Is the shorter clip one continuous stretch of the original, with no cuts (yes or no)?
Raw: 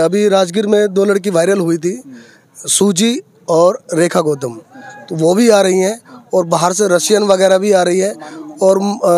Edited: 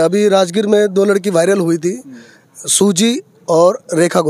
yes